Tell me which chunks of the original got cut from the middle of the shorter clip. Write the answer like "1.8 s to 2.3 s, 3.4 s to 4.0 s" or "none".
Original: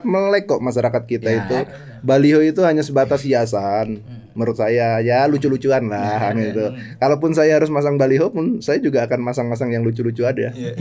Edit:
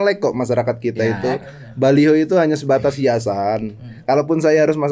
4.2 s to 6.8 s